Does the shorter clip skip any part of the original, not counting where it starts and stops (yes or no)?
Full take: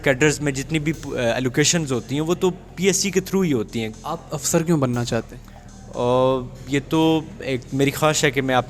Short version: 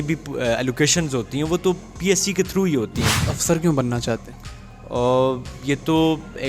yes